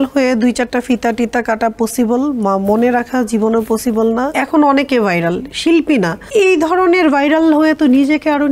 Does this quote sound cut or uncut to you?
cut